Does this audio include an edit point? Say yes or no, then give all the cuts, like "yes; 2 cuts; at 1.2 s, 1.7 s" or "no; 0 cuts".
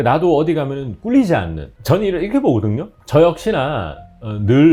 no; 0 cuts